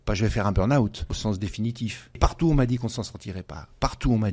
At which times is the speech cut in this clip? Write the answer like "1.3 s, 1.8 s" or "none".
1.1 s, 2.2 s